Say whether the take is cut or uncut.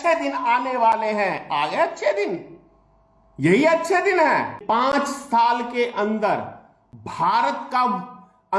cut